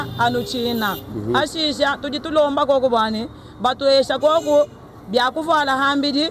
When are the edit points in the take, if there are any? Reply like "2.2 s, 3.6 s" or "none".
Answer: none